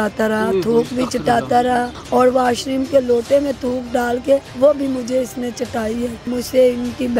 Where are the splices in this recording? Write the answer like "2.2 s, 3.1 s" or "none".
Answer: 2.0 s, 4.5 s, 6.2 s